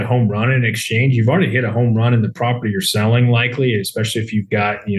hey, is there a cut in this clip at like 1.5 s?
no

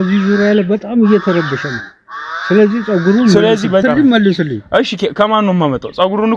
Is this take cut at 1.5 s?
no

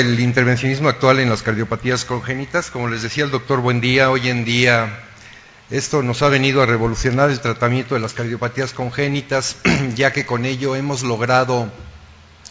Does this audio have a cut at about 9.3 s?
yes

